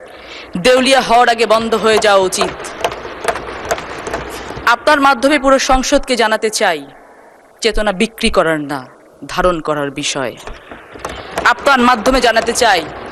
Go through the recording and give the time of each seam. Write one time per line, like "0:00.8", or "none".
none